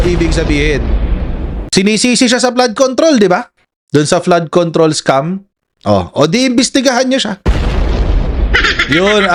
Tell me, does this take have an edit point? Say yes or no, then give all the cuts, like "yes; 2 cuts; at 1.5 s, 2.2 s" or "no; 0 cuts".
no; 0 cuts